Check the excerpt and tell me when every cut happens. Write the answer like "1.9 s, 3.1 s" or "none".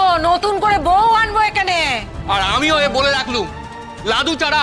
2.1 s